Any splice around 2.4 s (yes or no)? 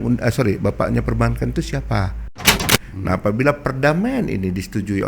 yes